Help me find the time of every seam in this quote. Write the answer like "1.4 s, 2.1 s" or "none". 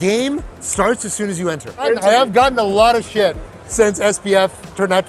1.8 s